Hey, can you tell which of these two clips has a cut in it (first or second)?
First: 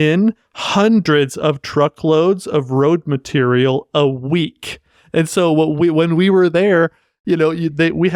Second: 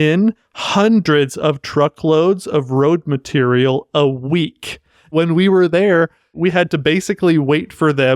second